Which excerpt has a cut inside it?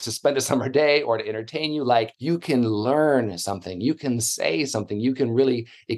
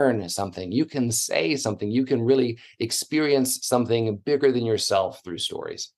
first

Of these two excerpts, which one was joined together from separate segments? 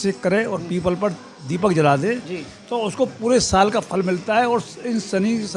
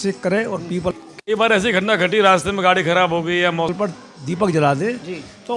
second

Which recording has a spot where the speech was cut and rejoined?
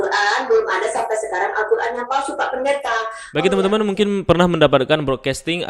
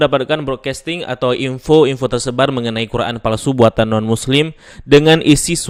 first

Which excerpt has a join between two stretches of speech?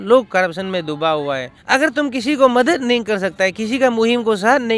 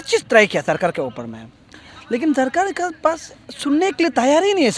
first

